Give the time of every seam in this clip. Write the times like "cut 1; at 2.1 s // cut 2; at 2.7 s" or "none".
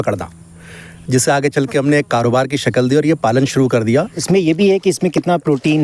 cut 1; at 4.2 s